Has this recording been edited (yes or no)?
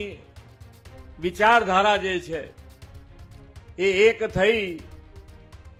no